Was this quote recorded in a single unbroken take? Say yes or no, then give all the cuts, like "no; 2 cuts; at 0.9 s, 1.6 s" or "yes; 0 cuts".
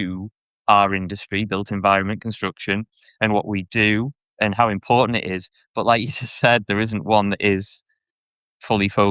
yes; 0 cuts